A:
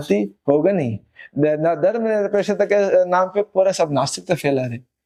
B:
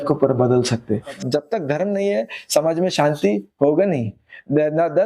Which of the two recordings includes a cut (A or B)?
B